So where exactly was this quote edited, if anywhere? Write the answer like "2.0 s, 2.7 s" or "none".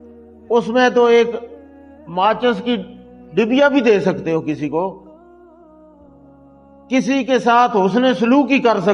5.3 s, 6.9 s